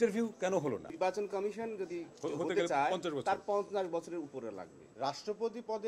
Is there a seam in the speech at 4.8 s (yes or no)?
yes